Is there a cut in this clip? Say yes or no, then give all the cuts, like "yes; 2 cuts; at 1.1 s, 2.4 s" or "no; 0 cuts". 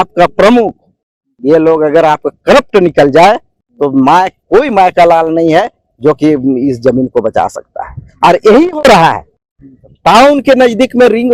no; 0 cuts